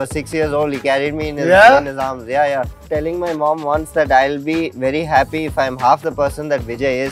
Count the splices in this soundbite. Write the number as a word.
one